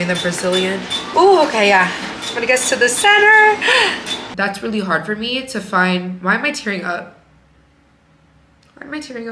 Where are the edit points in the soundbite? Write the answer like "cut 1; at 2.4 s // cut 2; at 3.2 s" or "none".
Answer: cut 1; at 1.0 s // cut 2; at 4.2 s